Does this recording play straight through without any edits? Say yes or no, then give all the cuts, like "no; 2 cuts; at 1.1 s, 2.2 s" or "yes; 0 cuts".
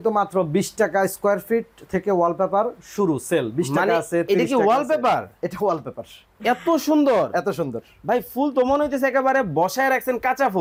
yes; 0 cuts